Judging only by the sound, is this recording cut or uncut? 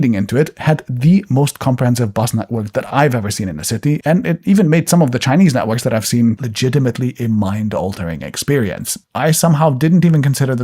cut